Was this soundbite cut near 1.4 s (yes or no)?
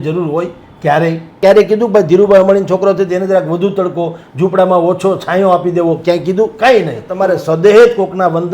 yes